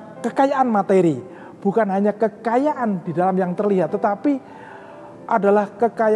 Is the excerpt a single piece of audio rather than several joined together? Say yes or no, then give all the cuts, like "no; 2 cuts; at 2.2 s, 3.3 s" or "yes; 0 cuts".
yes; 0 cuts